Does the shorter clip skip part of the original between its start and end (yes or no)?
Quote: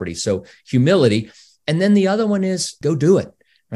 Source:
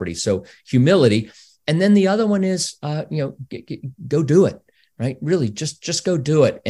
yes